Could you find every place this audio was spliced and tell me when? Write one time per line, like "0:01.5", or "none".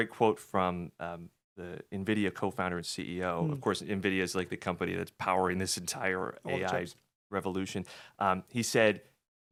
none